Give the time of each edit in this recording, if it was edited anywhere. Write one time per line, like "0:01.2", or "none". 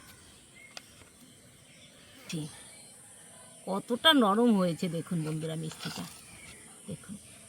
0:02.2